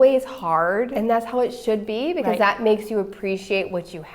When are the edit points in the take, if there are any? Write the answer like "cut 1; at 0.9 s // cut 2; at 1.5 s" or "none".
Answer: cut 1; at 0.9 s